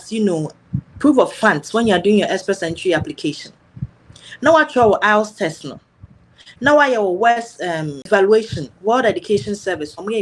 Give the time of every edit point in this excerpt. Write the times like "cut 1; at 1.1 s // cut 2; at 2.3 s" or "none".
cut 1; at 8.1 s